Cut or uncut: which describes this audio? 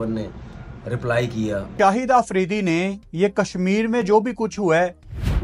uncut